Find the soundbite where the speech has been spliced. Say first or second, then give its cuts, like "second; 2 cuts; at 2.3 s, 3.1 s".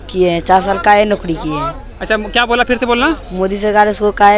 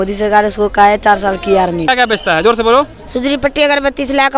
second; 1 cut; at 1.9 s